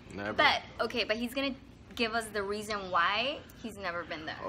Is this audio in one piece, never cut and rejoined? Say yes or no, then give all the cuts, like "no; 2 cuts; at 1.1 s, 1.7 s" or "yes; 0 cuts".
yes; 0 cuts